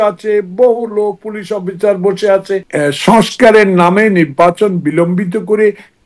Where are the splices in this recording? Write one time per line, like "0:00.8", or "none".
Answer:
0:02.7